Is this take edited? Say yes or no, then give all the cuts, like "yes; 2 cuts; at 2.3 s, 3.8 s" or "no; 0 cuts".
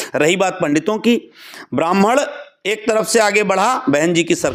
no; 0 cuts